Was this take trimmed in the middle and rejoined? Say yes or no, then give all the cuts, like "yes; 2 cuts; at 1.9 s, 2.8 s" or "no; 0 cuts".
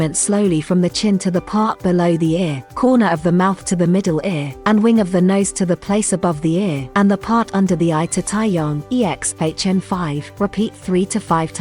yes; 5 cuts; at 2.6 s, 4.5 s, 6.8 s, 8.8 s, 10.2 s